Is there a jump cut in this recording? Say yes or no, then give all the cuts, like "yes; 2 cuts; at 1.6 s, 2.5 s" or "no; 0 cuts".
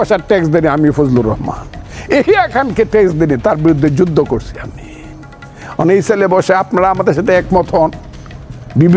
yes; 1 cut; at 1.9 s